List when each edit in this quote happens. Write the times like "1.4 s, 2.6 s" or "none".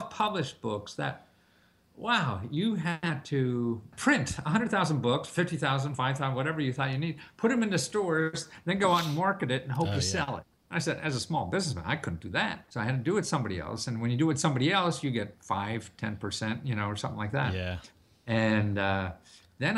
3.9 s, 10.5 s, 12.6 s